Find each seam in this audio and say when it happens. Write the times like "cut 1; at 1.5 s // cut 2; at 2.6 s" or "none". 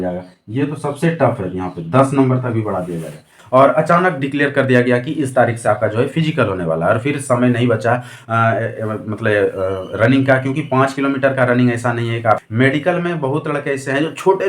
cut 1; at 3.4 s // cut 2; at 12.4 s

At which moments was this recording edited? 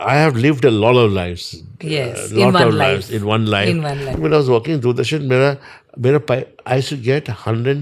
cut 1; at 4.1 s

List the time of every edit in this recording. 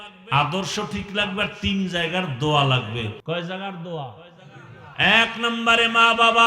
cut 1; at 3.1 s

